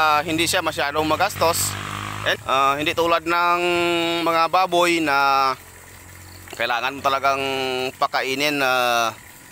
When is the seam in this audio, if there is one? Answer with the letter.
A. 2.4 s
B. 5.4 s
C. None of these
A